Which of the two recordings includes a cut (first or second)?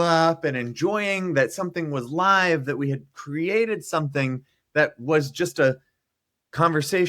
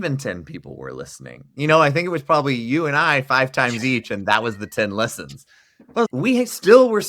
second